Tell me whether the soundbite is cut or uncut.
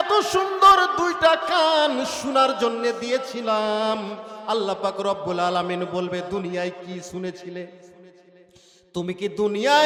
uncut